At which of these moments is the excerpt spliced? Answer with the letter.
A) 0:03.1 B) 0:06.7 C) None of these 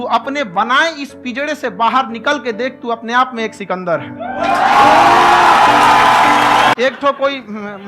B